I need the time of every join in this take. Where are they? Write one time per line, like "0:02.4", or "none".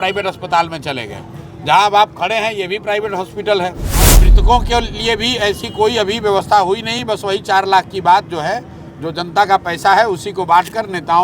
0:04.3